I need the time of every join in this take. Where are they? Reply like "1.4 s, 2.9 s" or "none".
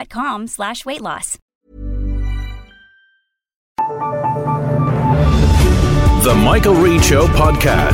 1.3 s, 3.7 s